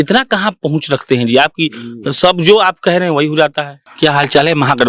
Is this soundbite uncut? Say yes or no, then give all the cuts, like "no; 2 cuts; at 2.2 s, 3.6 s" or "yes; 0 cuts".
no; 1 cut; at 3.8 s